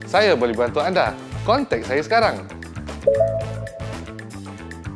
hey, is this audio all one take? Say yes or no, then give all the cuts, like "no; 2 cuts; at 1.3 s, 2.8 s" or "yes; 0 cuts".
no; 1 cut; at 3.6 s